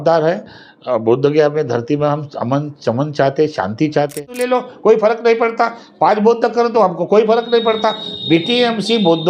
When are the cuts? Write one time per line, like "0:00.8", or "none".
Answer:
0:04.2